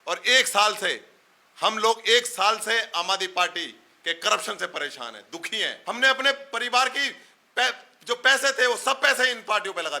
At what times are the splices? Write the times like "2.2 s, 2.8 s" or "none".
5.7 s